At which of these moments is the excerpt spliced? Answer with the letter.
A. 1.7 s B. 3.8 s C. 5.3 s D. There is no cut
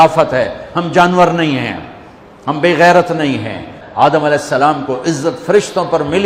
B